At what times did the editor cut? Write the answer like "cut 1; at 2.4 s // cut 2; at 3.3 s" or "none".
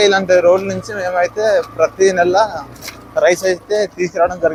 none